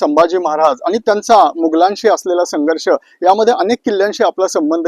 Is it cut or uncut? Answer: uncut